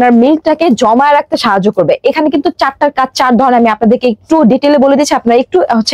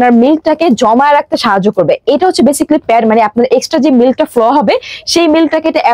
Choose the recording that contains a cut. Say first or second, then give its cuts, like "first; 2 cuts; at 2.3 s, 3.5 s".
second; 1 cut; at 2.0 s